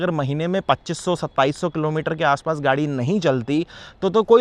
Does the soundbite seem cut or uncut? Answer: uncut